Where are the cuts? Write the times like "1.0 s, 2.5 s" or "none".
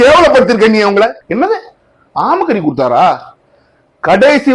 none